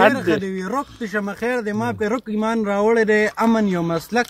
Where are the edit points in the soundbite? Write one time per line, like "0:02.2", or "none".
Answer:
none